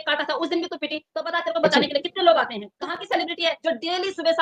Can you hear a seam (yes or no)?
yes